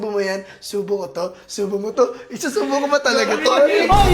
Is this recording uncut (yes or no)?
yes